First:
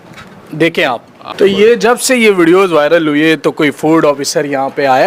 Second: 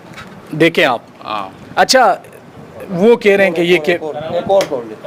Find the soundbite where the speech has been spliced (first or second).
first